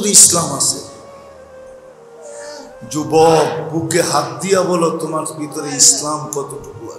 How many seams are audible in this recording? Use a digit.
0